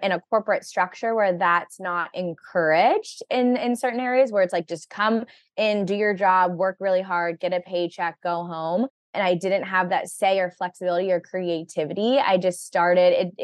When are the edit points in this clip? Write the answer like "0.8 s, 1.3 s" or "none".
9.1 s

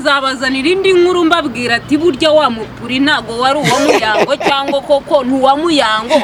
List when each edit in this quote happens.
none

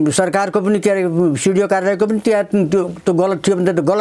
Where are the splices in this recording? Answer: none

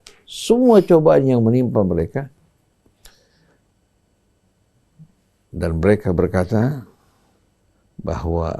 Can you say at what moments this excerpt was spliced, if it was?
none

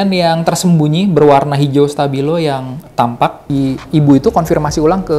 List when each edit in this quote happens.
3.5 s

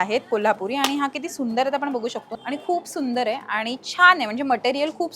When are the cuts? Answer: 2.3 s

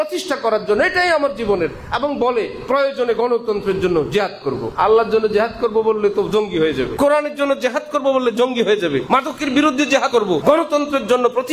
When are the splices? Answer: 4.7 s, 6.9 s, 9.0 s, 10.2 s

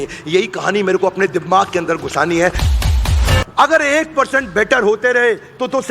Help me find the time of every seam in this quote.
2.9 s

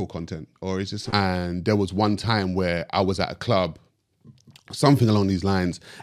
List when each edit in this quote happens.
1.0 s

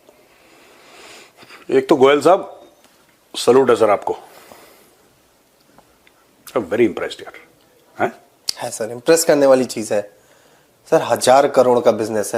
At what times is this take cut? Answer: none

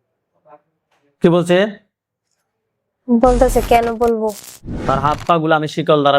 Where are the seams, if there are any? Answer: 4.8 s

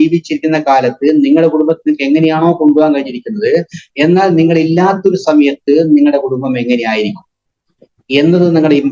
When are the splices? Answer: none

